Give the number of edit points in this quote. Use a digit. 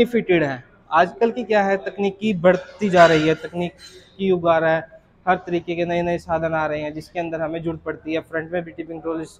0